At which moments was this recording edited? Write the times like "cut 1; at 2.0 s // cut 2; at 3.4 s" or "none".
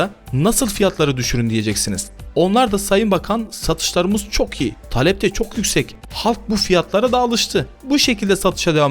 cut 1; at 6.0 s